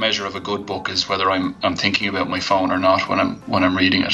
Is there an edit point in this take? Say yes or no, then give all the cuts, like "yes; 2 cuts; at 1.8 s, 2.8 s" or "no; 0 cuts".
no; 0 cuts